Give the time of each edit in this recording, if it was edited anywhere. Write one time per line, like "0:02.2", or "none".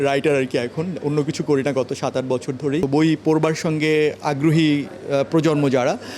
0:02.8